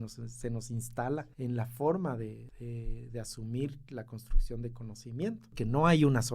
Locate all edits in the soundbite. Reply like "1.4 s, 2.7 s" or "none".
1.3 s, 2.5 s, 5.5 s